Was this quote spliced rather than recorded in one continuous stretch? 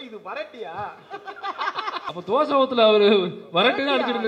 yes; 1 cut; at 2.1 s

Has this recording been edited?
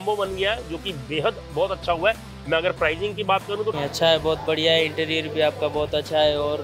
yes; 1 cut; at 3.8 s

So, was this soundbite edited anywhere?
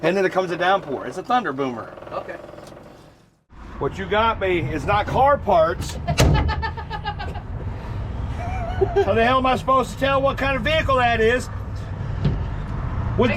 yes; 1 cut; at 3.7 s

